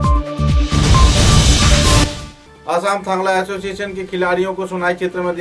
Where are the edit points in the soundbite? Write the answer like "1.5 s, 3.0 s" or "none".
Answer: 2.0 s